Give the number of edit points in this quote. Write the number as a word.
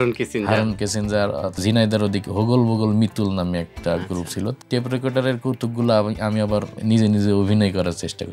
three